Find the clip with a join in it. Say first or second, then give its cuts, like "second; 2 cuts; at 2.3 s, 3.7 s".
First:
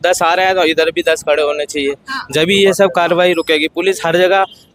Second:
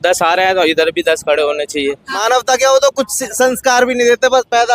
second; 1 cut; at 2.1 s